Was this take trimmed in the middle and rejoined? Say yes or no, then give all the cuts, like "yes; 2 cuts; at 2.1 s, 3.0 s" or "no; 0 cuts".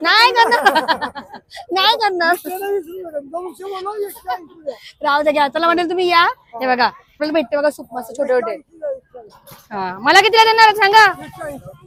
no; 0 cuts